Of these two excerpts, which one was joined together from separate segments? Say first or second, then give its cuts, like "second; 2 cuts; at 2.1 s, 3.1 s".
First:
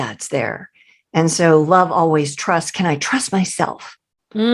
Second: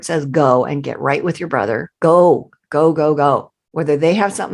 second; 1 cut; at 1.9 s